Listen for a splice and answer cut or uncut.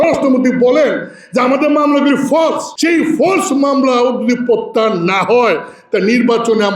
cut